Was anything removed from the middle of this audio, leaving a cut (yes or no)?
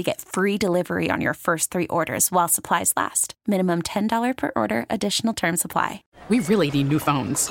yes